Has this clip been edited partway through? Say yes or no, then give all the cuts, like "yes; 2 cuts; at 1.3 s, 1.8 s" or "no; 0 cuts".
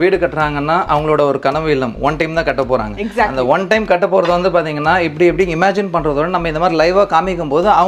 no; 0 cuts